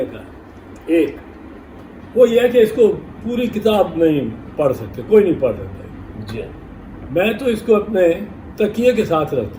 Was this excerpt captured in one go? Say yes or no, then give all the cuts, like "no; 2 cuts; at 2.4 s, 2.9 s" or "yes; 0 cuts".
yes; 0 cuts